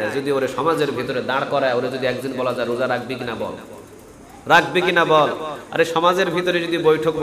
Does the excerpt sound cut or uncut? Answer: uncut